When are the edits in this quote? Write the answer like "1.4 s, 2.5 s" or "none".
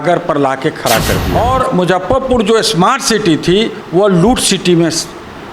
1.3 s